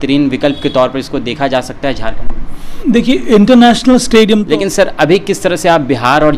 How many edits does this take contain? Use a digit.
2